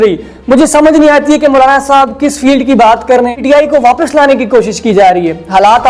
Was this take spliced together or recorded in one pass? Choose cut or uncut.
cut